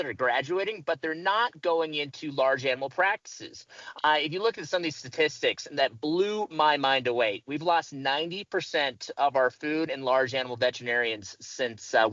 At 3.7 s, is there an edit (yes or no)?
no